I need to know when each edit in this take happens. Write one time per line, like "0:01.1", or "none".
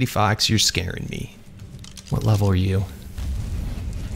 0:01.3